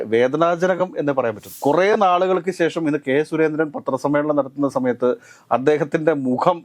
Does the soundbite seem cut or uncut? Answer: cut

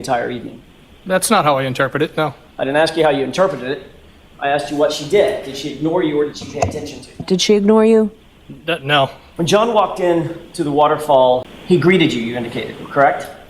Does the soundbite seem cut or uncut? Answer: cut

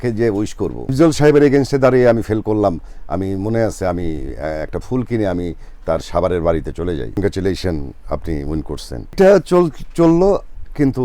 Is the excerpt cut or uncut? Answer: cut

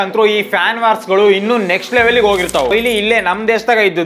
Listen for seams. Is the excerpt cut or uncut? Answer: cut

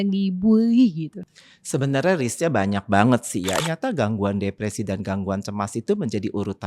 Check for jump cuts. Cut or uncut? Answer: cut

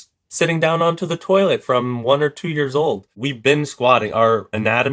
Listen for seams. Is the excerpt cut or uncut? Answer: cut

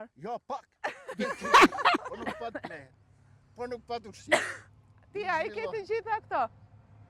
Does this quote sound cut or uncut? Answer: cut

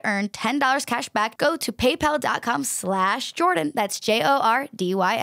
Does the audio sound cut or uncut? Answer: cut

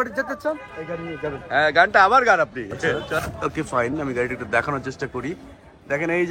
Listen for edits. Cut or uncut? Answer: cut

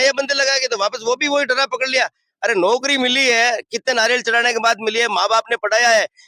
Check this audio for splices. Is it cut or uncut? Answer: uncut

